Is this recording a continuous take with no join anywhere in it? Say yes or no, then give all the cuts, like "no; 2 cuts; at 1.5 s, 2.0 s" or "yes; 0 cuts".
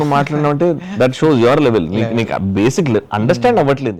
yes; 0 cuts